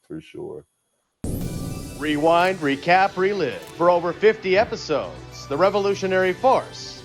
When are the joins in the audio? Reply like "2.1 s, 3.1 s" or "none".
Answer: 1.2 s